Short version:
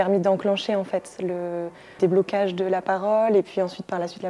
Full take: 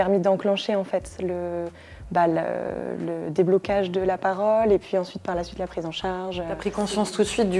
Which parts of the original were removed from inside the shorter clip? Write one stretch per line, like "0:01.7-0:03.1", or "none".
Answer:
0:01.9-0:03.2